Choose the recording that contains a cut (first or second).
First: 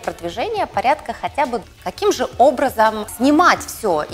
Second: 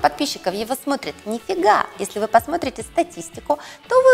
first